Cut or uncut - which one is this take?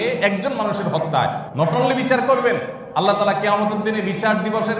cut